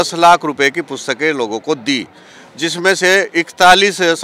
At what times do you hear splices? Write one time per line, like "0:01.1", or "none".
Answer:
none